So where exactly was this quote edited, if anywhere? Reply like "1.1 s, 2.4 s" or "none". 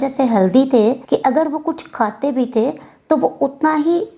1.0 s